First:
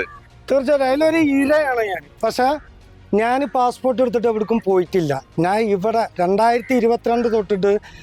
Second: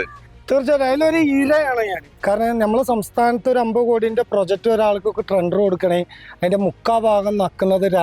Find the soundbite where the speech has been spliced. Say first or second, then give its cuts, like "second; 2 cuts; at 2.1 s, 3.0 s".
second; 1 cut; at 2.0 s